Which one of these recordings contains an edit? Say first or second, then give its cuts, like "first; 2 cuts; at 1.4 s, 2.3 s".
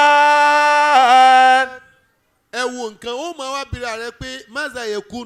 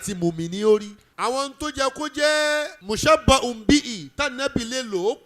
second; 2 cuts; at 1.0 s, 2.8 s